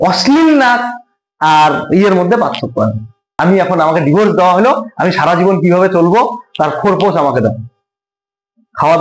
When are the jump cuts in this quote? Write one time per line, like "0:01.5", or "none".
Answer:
0:03.3